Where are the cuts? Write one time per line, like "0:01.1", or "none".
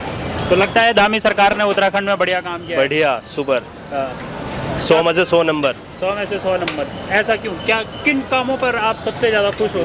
none